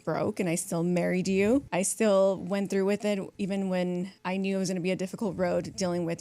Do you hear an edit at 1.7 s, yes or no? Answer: yes